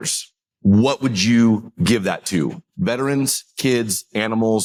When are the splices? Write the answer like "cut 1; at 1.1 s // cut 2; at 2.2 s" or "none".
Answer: none